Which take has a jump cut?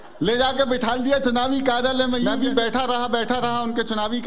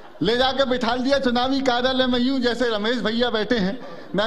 first; 1 cut; at 2.3 s

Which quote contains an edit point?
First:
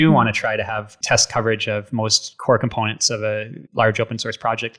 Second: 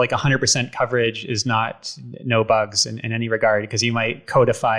first; 3 cuts; at 0.9 s, 2.3 s, 3.6 s

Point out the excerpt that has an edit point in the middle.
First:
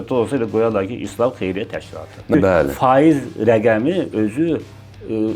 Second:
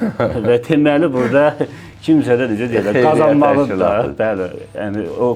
first; 1 cut; at 2.3 s

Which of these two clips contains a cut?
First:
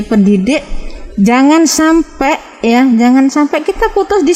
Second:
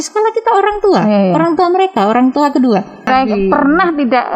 second; 1 cut; at 3.1 s

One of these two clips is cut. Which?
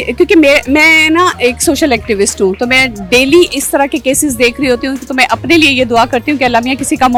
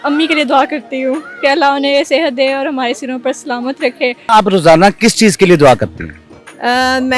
second; 1 cut; at 4.3 s

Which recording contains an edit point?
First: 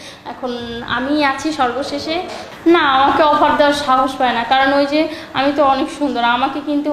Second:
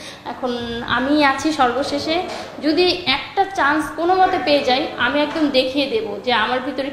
first; 1 cut; at 2.4 s

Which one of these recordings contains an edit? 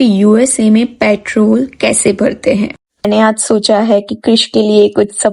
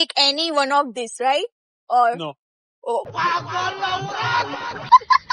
first; 1 cut; at 3.1 s

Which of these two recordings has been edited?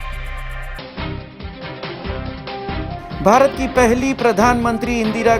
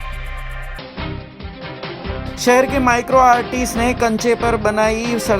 first; 1 cut; at 2.2 s

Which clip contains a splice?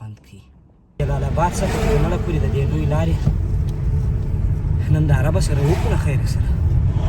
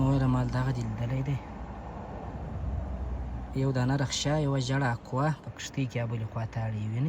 first; 1 cut; at 1.0 s

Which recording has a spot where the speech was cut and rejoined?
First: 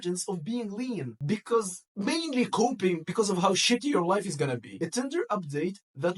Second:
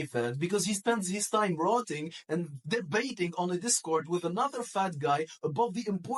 first; 2 cuts; at 1.2 s, 4.7 s

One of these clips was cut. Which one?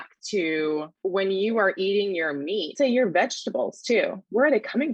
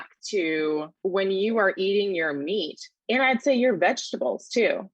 first; 1 cut; at 2.7 s

